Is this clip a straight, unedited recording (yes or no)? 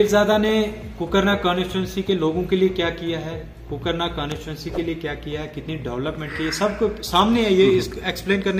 yes